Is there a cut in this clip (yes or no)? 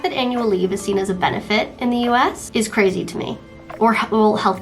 yes